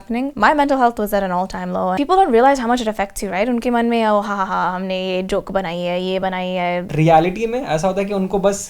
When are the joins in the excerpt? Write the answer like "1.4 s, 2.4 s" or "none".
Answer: 2.0 s, 6.9 s